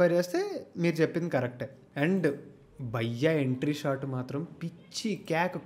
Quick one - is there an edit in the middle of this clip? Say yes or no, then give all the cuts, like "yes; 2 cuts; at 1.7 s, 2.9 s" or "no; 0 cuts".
yes; 1 cut; at 1.9 s